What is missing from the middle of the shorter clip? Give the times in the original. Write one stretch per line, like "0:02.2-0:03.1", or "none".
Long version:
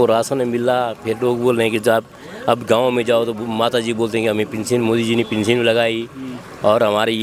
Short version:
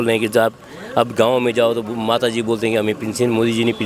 none